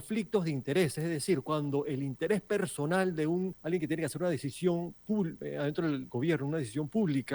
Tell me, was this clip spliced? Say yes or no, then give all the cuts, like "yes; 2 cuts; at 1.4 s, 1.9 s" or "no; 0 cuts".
yes; 2 cuts; at 3.6 s, 5.4 s